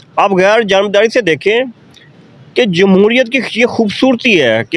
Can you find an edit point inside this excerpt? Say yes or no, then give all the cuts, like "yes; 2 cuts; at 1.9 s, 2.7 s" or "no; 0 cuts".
no; 0 cuts